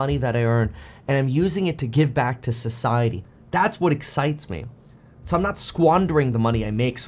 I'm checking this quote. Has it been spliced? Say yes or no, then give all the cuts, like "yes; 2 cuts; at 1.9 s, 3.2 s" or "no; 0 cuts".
yes; 1 cut; at 3.3 s